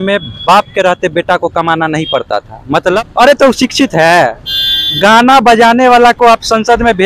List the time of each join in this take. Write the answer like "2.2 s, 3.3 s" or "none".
2.8 s

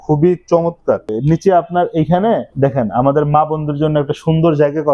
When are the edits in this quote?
1.1 s, 2.5 s

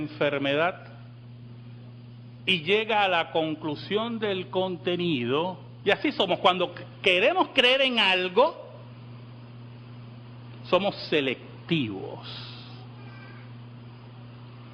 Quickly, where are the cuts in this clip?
none

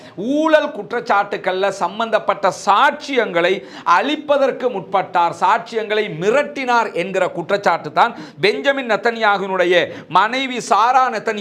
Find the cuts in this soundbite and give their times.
none

